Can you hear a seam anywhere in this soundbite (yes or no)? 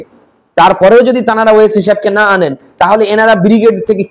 no